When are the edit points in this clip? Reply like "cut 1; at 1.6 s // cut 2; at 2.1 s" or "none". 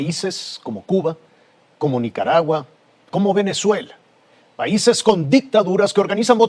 none

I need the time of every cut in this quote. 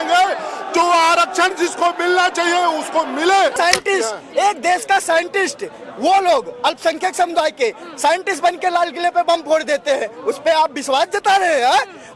cut 1; at 3.5 s

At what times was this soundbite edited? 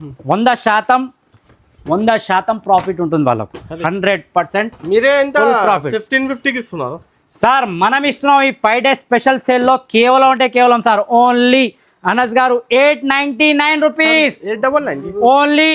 none

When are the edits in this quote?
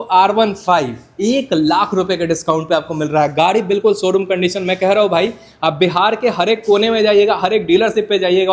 none

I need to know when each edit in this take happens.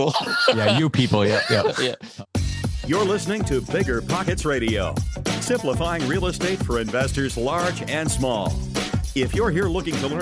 cut 1; at 2.0 s

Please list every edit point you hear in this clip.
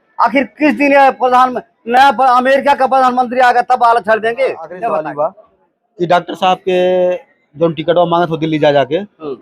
cut 1; at 4.9 s

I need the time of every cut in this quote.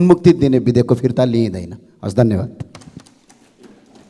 none

